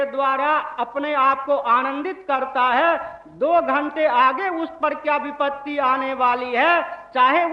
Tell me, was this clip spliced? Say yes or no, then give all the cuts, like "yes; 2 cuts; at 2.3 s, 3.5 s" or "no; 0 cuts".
no; 0 cuts